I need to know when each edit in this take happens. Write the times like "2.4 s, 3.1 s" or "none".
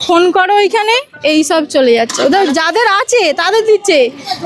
none